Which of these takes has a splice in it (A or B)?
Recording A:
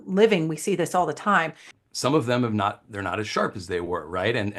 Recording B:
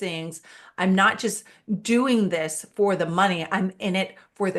A